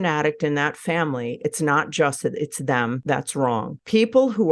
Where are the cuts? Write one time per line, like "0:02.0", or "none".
0:03.2